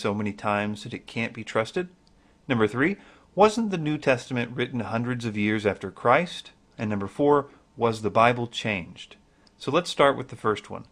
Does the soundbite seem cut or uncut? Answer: cut